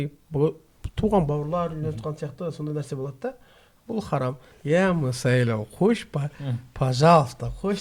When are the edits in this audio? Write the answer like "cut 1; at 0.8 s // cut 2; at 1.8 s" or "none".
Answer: cut 1; at 4.5 s